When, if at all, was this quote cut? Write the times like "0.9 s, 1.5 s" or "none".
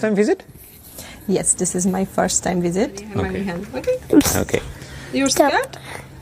3.0 s